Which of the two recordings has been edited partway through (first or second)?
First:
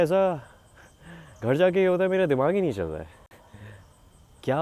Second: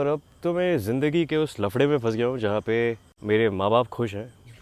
second